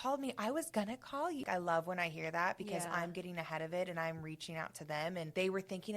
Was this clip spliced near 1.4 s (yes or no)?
yes